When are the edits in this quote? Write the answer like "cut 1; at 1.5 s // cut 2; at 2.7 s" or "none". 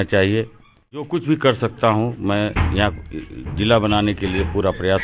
cut 1; at 1.1 s